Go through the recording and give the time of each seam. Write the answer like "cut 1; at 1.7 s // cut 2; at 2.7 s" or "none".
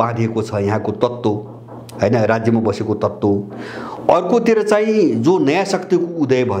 none

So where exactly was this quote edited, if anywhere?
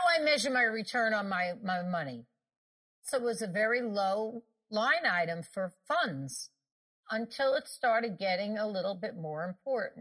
cut 1; at 3.1 s // cut 2; at 4.7 s // cut 3; at 5.8 s // cut 4; at 7.0 s

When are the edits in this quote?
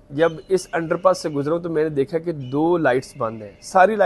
none

